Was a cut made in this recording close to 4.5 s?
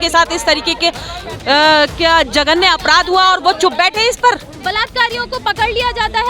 yes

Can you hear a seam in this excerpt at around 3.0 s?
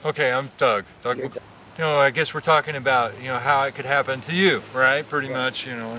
no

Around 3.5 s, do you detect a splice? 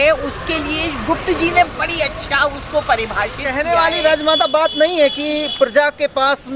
yes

